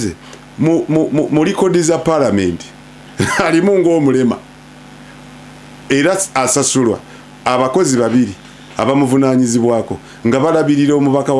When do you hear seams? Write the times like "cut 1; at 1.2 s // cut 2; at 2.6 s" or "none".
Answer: none

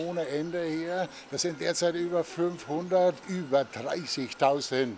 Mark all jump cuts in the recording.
cut 1; at 3.3 s

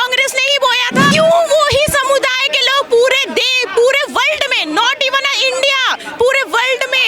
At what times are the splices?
cut 1; at 1.1 s

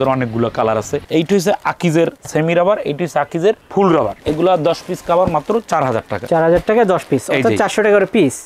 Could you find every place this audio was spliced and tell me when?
cut 1; at 1.0 s // cut 2; at 4.2 s

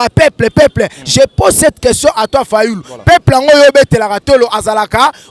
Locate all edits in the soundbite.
none

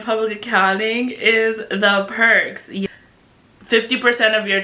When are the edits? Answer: cut 1; at 2.9 s

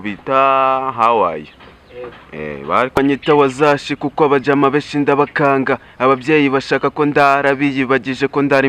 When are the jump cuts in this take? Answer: cut 1; at 3.0 s

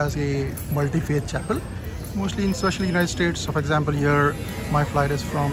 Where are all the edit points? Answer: none

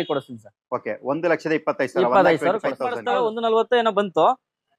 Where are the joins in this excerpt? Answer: cut 1; at 2.9 s

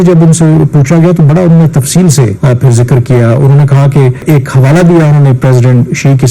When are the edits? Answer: cut 1; at 2.4 s // cut 2; at 4.2 s

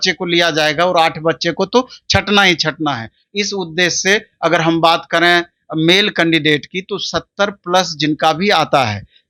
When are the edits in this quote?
none

